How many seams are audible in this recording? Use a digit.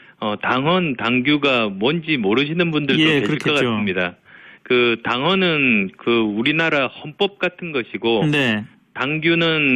0